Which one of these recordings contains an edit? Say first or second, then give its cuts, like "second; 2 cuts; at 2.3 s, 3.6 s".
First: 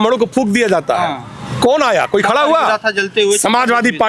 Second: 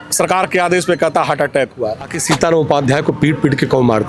second; 1 cut; at 2.2 s